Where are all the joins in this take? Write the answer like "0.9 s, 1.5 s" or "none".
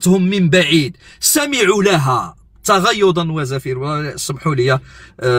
none